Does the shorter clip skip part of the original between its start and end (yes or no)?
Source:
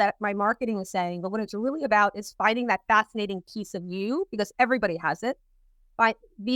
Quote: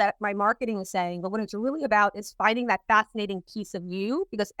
no